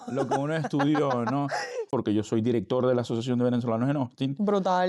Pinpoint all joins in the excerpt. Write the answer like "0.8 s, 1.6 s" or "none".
1.9 s